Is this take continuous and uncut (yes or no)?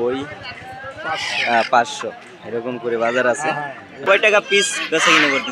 no